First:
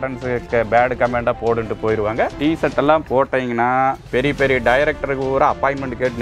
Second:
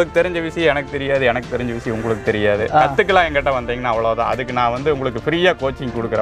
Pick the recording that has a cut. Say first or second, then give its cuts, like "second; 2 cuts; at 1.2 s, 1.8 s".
first; 2 cuts; at 2.4 s, 4.0 s